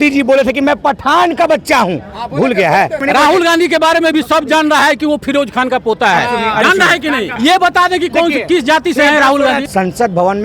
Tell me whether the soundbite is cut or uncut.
cut